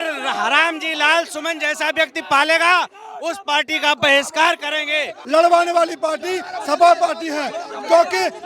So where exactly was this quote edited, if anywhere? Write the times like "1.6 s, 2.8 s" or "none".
5.1 s